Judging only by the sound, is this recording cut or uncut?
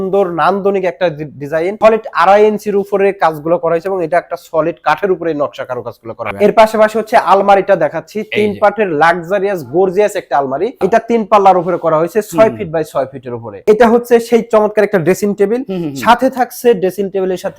cut